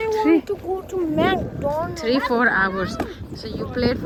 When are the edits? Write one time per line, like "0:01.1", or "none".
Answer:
none